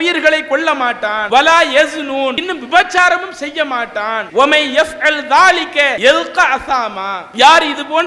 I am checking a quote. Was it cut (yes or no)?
yes